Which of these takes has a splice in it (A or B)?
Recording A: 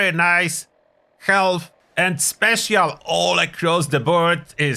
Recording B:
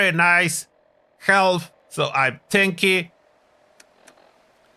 A